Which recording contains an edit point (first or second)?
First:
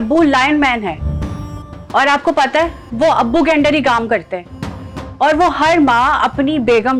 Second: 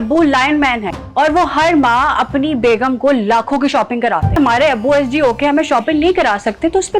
second